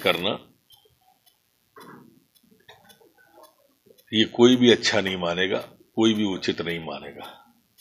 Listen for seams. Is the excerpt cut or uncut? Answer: uncut